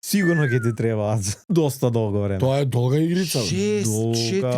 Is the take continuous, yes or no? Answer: no